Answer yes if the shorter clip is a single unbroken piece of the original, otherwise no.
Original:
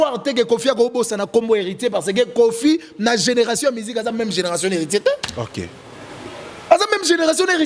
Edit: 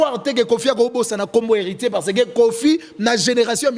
yes